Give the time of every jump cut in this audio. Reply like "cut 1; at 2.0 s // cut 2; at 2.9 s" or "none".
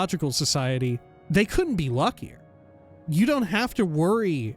cut 1; at 1.1 s // cut 2; at 3.0 s